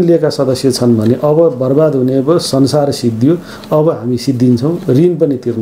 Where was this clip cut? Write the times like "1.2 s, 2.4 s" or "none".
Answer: none